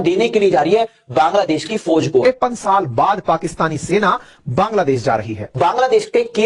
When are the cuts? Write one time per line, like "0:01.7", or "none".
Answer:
0:05.4